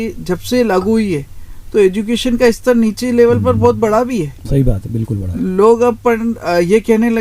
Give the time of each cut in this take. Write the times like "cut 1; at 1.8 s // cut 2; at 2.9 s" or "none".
none